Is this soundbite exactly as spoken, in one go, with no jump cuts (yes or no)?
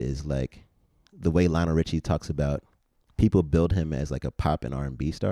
yes